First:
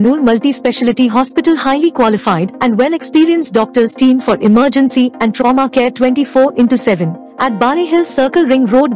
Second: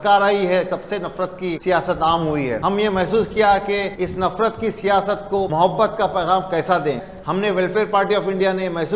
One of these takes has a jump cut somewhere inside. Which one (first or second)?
second